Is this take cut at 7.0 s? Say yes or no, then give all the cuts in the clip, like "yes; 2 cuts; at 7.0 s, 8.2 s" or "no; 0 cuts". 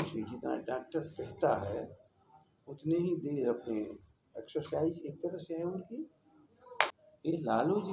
yes; 1 cut; at 7.0 s